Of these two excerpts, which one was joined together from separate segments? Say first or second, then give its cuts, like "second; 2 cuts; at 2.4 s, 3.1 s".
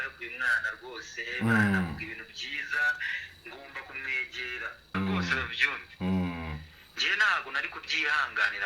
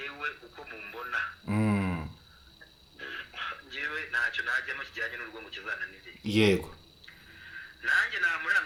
first; 1 cut; at 4.9 s